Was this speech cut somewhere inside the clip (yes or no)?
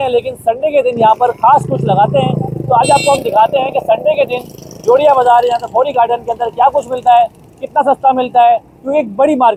no